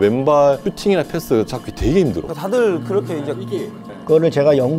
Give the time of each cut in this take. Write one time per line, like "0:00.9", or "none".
0:03.8